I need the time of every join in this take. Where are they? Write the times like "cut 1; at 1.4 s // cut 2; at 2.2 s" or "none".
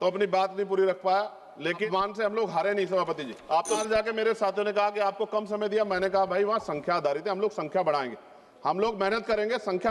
cut 1; at 1.9 s // cut 2; at 3.8 s